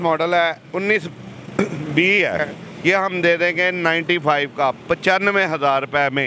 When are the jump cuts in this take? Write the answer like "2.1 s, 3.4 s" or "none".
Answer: 2.5 s

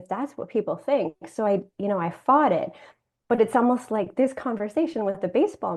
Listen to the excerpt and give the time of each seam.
none

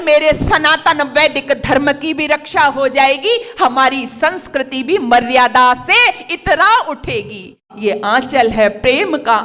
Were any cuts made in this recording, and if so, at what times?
7.7 s

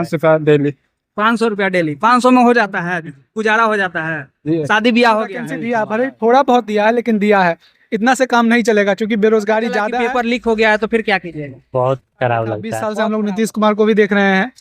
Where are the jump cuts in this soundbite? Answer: 5.5 s, 9.9 s, 12.8 s

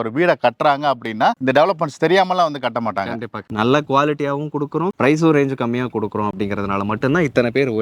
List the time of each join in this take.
3.2 s

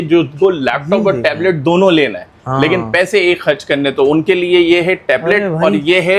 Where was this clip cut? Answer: none

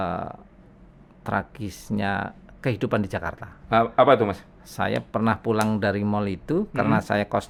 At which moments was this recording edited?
none

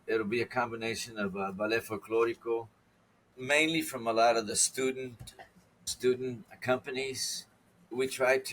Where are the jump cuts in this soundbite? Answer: none

